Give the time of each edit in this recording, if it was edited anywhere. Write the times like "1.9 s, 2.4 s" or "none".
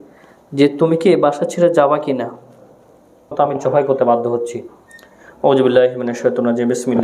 3.3 s